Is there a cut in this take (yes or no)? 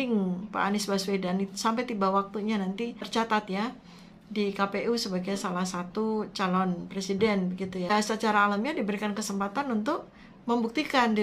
yes